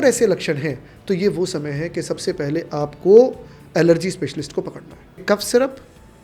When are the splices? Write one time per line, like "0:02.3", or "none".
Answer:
0:05.2